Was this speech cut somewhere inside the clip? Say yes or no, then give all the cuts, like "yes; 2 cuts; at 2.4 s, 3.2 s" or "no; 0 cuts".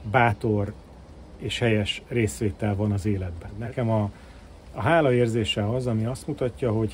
yes; 1 cut; at 3.7 s